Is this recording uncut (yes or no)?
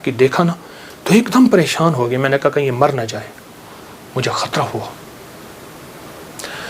yes